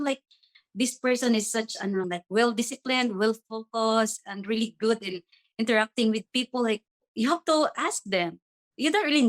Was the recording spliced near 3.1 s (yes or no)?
no